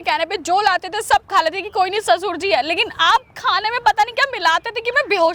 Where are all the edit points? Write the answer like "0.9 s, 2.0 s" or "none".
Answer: none